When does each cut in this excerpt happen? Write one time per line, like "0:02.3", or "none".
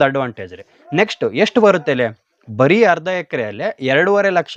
none